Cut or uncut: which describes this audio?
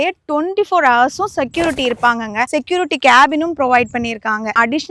uncut